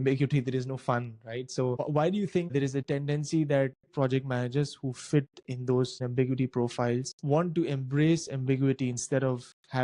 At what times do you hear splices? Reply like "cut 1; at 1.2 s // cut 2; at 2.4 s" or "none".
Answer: cut 1; at 2.8 s